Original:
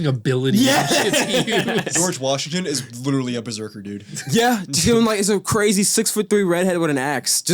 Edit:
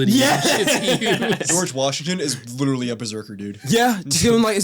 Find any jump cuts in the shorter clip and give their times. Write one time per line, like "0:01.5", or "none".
0:03.5